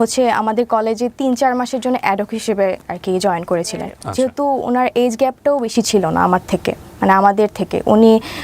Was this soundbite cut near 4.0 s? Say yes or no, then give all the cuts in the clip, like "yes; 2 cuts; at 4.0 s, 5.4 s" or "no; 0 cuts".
yes; 1 cut; at 4.0 s